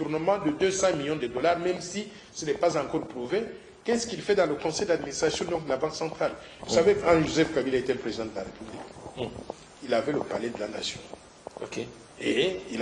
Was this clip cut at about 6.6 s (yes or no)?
yes